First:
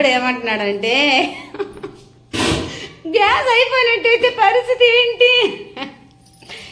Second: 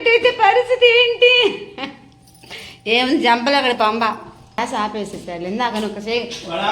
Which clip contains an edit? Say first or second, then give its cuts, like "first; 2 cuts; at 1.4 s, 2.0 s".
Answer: second; 1 cut; at 4.6 s